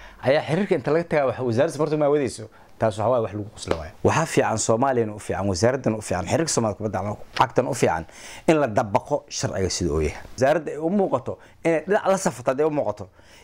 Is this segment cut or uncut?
cut